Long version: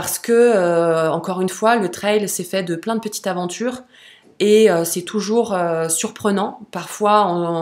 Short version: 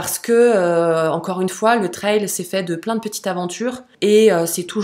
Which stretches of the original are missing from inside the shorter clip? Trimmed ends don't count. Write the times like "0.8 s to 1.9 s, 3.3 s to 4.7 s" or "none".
3.9 s to 4.2 s